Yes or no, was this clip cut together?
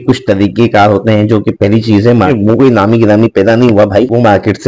yes